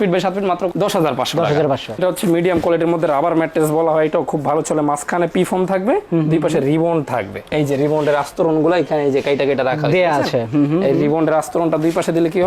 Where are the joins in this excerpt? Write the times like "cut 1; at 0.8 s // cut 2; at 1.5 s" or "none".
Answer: cut 1; at 2.0 s